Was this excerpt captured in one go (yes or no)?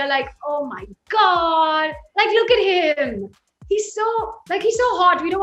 yes